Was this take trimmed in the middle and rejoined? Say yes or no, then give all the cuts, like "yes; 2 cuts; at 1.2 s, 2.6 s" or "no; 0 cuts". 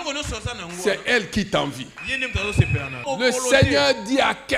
yes; 1 cut; at 3.0 s